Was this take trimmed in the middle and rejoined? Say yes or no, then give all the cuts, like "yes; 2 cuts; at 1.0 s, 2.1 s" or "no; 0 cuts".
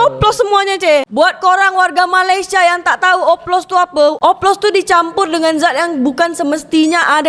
no; 0 cuts